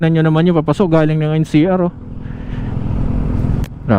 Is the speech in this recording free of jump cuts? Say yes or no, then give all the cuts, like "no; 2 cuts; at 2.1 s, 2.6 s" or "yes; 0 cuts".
yes; 0 cuts